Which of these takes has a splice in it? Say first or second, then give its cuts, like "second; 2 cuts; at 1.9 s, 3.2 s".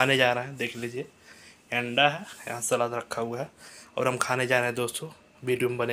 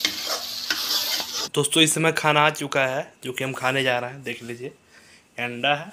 second; 1 cut; at 1.4 s